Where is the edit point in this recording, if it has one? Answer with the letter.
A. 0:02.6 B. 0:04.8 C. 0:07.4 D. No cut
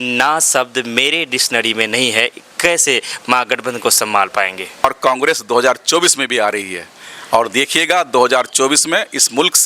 B